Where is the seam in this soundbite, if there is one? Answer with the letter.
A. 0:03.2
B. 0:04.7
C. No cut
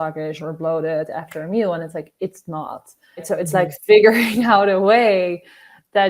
A